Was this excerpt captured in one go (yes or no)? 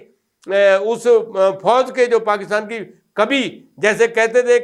yes